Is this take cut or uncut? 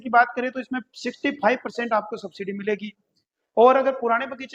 uncut